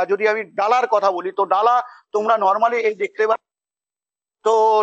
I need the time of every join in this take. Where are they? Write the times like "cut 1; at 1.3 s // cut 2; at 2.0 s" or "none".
none